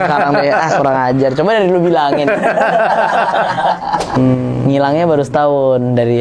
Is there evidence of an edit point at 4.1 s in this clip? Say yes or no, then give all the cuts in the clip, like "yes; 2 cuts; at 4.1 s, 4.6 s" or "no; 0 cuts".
yes; 1 cut; at 4.1 s